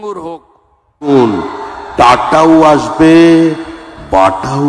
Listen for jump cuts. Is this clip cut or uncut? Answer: cut